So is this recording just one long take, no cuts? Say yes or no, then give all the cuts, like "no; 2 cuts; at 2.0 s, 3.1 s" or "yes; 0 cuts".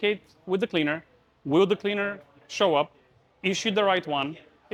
yes; 0 cuts